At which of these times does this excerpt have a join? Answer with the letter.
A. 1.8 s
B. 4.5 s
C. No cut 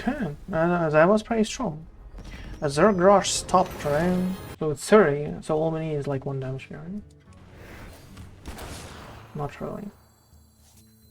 B